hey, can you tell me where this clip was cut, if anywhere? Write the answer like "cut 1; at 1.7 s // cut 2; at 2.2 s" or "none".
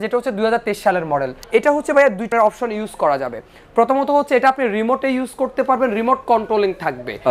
cut 1; at 1.4 s // cut 2; at 2.3 s